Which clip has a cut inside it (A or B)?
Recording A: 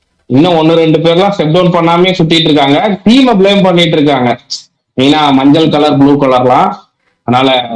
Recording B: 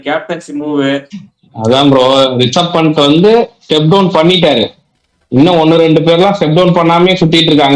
B